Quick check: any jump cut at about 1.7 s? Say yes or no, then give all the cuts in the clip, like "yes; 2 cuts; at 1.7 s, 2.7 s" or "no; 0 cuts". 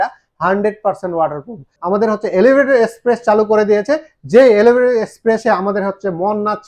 yes; 1 cut; at 1.7 s